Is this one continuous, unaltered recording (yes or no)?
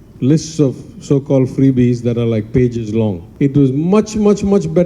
no